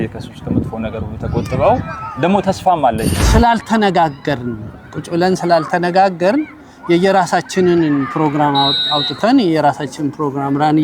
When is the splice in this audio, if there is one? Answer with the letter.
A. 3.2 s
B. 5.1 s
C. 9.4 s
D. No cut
A